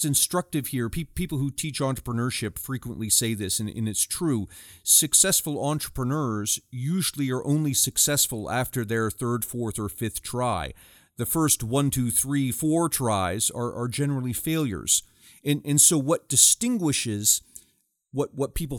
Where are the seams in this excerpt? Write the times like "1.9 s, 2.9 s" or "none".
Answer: none